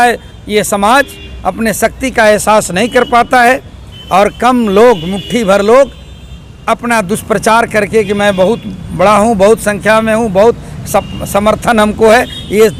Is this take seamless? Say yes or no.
yes